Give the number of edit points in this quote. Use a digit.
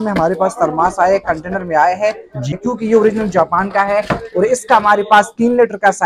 1